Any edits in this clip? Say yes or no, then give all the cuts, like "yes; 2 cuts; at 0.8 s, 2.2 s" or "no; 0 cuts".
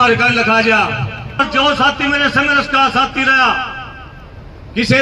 yes; 1 cut; at 1.4 s